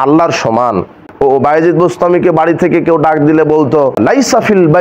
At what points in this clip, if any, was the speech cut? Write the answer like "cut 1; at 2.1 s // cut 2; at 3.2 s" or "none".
cut 1; at 1.0 s // cut 2; at 4.0 s